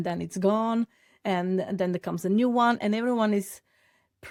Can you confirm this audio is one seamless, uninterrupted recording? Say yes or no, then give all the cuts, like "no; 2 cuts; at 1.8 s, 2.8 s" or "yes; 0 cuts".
yes; 0 cuts